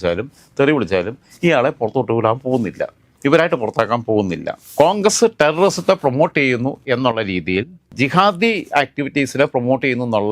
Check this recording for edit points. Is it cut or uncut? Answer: cut